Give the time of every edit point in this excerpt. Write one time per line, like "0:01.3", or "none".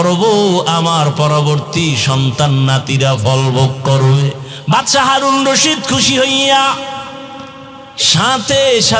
0:04.5